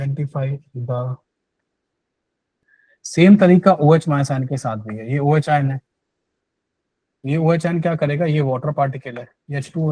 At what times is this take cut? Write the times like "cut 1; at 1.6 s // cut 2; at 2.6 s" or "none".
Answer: cut 1; at 2.5 s

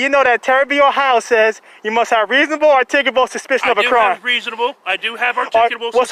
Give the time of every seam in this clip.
none

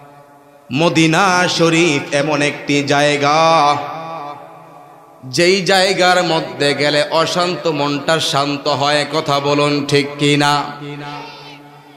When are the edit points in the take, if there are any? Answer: none

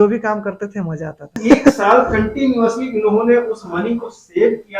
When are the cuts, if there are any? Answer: cut 1; at 1.4 s

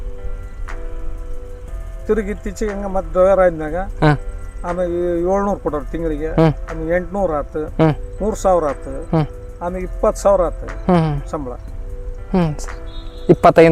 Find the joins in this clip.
none

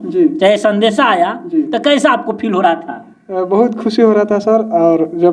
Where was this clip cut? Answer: none

